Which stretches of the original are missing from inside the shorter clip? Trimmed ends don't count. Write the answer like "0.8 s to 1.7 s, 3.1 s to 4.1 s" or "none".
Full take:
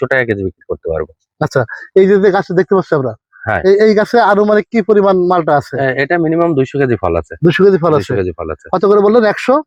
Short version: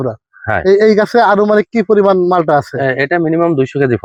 none